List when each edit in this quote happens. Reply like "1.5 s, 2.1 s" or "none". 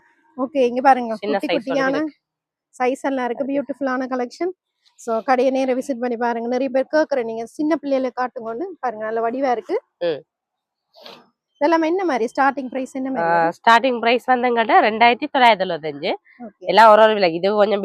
none